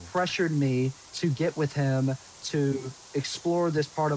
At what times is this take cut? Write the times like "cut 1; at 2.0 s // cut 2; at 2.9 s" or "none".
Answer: cut 1; at 1.0 s // cut 2; at 3.0 s